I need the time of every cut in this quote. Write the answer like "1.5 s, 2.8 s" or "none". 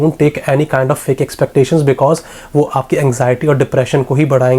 none